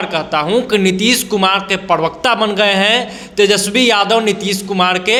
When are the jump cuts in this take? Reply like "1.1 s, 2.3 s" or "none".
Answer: none